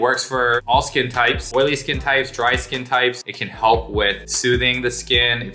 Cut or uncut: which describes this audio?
cut